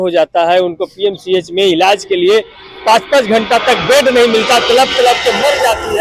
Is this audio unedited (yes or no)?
yes